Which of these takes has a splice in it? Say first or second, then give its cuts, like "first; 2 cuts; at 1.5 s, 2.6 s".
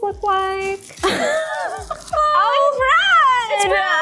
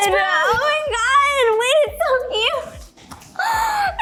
first; 2 cuts; at 0.9 s, 2.1 s